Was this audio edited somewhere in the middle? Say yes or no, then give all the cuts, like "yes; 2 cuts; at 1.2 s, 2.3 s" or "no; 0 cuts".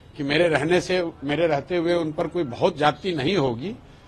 no; 0 cuts